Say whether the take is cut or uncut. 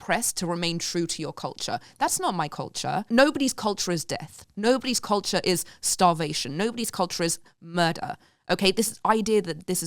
cut